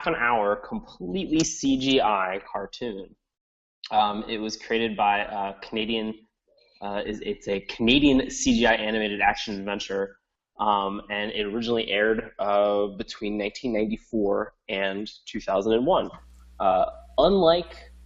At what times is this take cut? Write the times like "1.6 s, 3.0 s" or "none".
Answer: 2.7 s